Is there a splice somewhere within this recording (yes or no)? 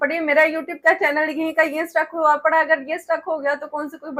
no